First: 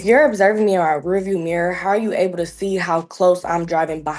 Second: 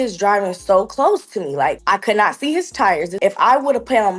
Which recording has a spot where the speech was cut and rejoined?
second; 2 cuts; at 1.8 s, 3.1 s

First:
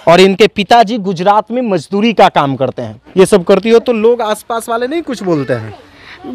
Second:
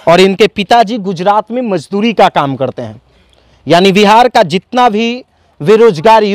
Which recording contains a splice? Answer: first; 1 cut; at 2.9 s

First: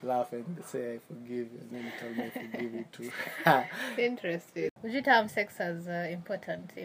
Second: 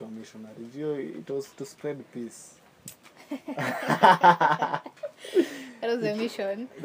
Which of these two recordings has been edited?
first; 1 cut; at 4.8 s

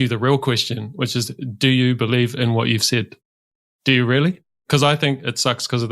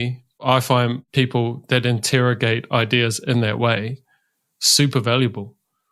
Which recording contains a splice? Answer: first; 1 cut; at 3.6 s

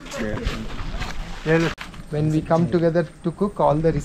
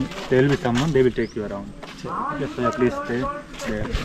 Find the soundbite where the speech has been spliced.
first; 1 cut; at 1.7 s

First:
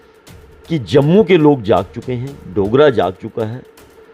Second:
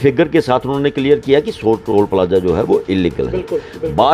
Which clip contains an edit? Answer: second; 1 cut; at 1.9 s

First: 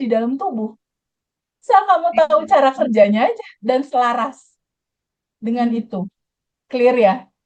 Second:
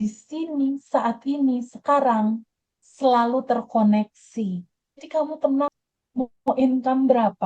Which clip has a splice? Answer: second; 1 cut; at 4.9 s

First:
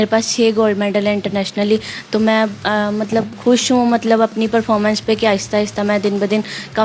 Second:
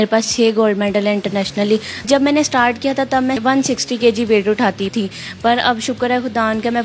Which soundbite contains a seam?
second; 3 cuts; at 2.1 s, 3.4 s, 4.9 s

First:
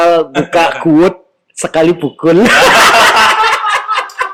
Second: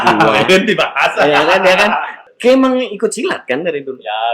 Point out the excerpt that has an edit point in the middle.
second; 1 cut; at 2.2 s

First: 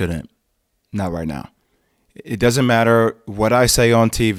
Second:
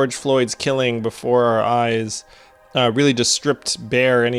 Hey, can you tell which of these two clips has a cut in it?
first; 1 cut; at 1.5 s

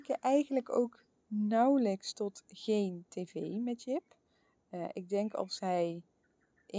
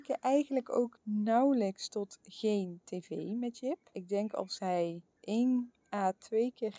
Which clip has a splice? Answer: second; 4 cuts; at 1.0 s, 4.0 s, 5.1 s, 5.8 s

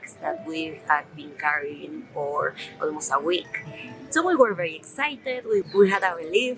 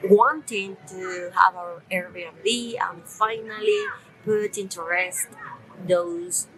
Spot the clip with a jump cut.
first; 1 cut; at 5.7 s

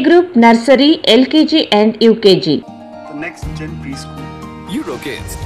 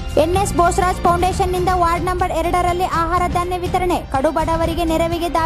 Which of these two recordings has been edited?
first; 1 cut; at 2.7 s

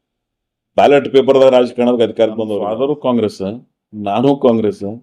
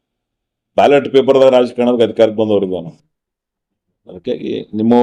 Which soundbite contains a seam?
first; 1 cut; at 2.6 s

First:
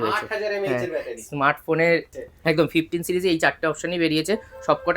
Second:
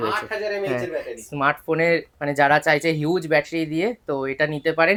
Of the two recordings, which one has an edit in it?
first; 1 cut; at 2.1 s

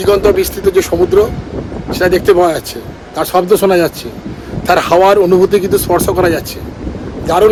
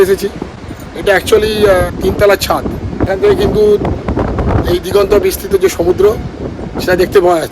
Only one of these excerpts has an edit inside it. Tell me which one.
second; 2 cuts; at 1.9 s, 3.1 s

